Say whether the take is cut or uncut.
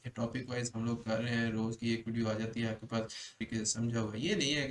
cut